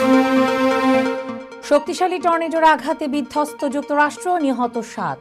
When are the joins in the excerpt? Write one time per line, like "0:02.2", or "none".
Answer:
0:01.3

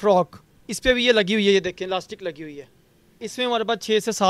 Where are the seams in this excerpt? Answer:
0:03.3

